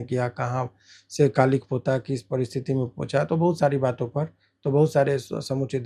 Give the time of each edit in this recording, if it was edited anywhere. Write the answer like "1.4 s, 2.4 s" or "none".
none